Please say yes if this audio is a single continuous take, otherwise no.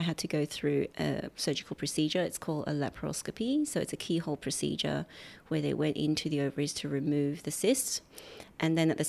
no